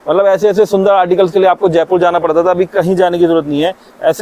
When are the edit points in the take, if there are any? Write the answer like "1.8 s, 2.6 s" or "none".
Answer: none